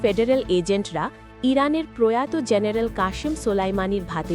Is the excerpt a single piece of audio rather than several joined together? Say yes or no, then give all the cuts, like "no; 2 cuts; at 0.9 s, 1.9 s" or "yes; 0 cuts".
yes; 0 cuts